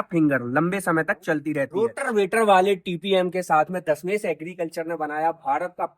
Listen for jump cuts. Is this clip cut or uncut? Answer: cut